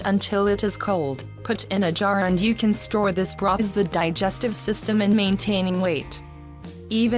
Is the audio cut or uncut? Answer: uncut